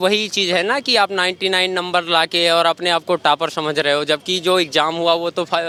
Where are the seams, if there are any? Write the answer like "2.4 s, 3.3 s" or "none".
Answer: none